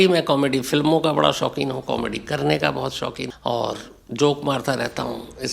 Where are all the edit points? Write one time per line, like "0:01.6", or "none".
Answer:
0:03.3